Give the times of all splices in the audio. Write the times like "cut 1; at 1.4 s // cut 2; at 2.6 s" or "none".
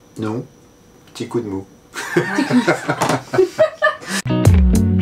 cut 1; at 4.1 s

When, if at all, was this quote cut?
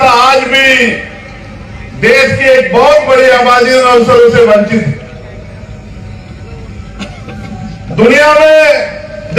cut 1; at 4.7 s

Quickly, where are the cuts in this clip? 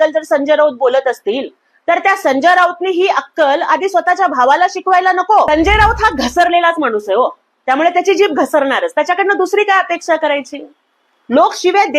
cut 1; at 5.5 s

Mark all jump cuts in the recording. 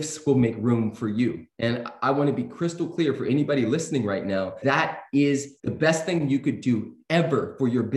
cut 1; at 1.5 s // cut 2; at 4.6 s // cut 3; at 5.6 s

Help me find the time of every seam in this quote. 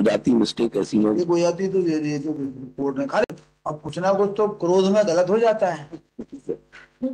cut 1; at 3.3 s

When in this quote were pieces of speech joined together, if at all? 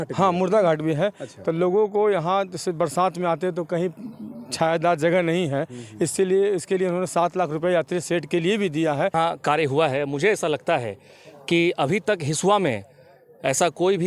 cut 1; at 9.1 s

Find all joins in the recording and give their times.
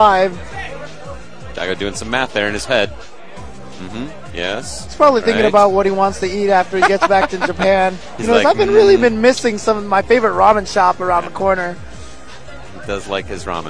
none

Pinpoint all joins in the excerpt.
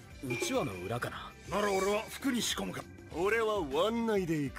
cut 1; at 2.7 s

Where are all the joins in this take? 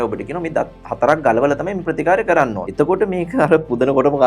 cut 1; at 2.6 s

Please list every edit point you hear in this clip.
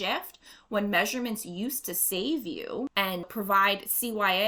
none

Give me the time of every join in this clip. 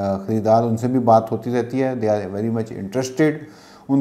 none

